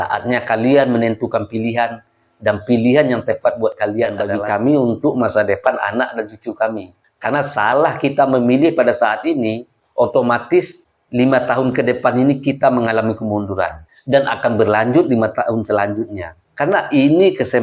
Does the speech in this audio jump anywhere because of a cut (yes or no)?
yes